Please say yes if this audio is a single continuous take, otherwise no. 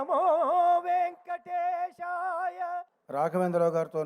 no